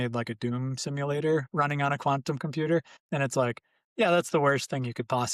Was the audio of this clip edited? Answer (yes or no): yes